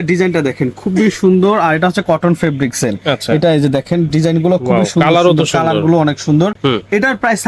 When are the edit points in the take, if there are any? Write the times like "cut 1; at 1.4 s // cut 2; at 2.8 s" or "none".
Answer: none